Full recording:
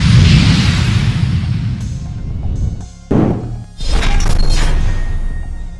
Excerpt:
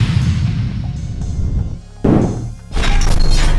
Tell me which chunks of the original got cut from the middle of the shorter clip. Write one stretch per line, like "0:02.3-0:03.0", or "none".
0:03.7-0:03.8